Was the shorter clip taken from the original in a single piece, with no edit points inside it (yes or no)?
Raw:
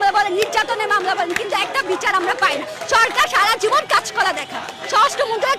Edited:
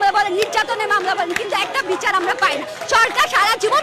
yes